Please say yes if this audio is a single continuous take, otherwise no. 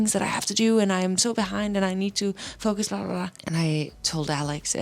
yes